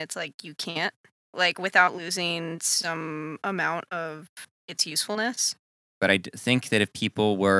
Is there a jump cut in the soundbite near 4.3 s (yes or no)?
no